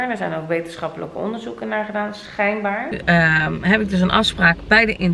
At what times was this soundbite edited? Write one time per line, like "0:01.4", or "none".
0:03.0